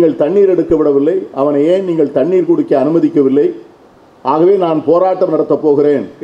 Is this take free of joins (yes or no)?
yes